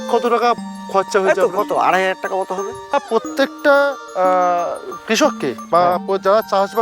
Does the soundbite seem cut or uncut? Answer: cut